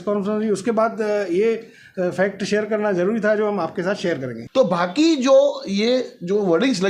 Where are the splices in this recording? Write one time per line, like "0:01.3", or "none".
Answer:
0:04.3